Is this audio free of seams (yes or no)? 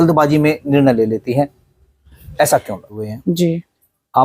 no